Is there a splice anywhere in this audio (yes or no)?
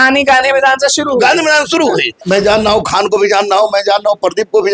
yes